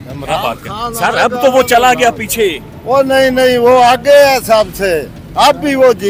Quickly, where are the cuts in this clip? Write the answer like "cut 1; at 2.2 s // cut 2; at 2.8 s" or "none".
none